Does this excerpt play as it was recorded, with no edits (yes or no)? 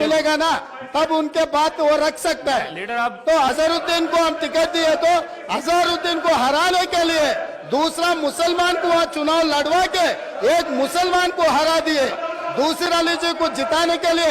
no